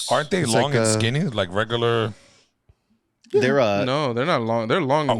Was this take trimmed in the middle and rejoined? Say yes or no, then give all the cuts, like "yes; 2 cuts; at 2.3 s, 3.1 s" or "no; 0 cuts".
no; 0 cuts